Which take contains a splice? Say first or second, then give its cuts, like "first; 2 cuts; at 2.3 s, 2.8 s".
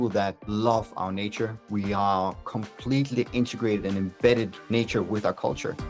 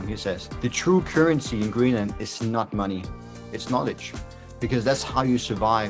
first; 1 cut; at 4.6 s